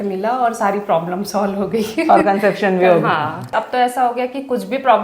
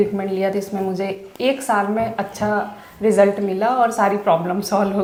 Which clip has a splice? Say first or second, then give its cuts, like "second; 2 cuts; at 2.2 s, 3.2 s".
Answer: first; 1 cut; at 3.5 s